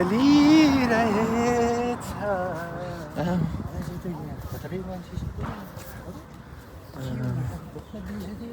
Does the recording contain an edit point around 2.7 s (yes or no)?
yes